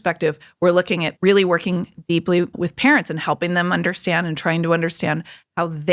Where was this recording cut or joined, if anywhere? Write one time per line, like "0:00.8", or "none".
0:01.1
0:02.5